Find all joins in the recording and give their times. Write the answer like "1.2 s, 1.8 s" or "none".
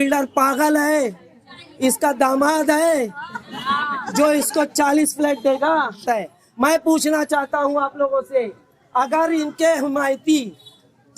6.0 s

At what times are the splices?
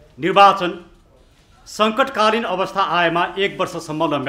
none

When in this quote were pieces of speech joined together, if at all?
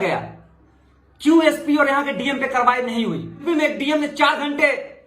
3.4 s

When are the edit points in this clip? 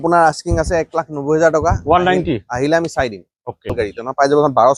3.7 s

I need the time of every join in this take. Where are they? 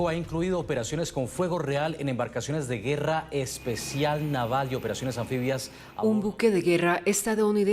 5.8 s

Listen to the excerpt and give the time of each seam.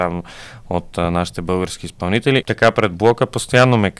2.4 s

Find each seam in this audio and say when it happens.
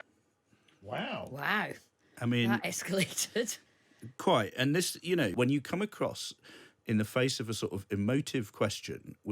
5.3 s

